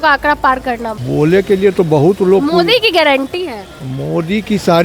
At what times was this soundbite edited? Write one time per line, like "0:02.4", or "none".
0:00.9